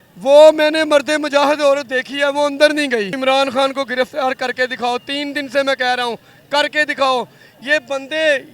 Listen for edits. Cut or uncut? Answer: cut